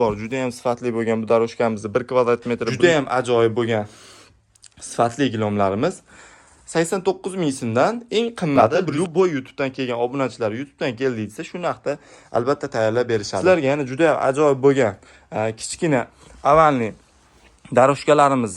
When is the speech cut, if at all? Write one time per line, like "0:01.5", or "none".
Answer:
0:02.7
0:08.8
0:13.3

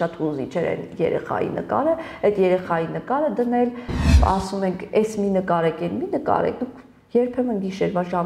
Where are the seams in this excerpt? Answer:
0:04.1

